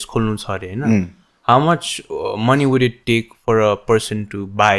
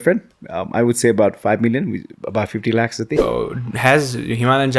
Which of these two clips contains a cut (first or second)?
second